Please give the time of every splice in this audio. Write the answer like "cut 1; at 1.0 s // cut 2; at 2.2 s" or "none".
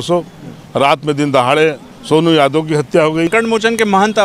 cut 1; at 3.3 s